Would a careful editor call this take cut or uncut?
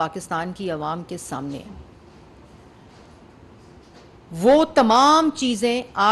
uncut